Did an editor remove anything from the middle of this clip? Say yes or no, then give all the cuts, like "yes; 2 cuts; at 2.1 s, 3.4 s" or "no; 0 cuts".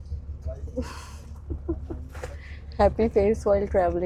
no; 0 cuts